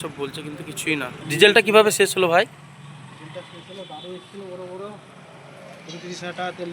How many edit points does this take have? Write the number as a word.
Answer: one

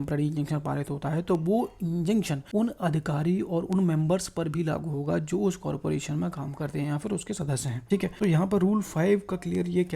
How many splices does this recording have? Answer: two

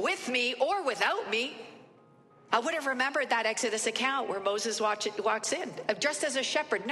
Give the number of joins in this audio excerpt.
one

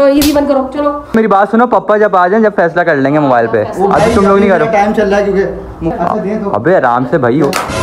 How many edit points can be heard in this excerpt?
two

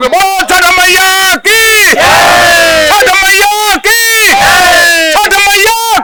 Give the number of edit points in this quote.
zero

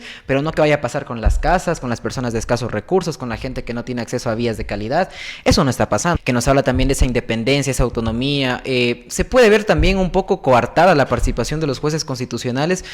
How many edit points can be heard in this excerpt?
one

